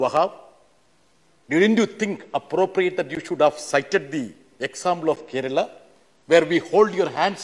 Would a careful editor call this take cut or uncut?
uncut